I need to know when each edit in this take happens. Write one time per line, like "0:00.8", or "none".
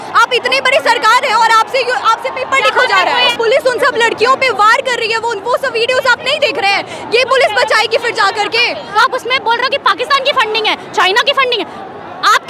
0:03.3
0:08.9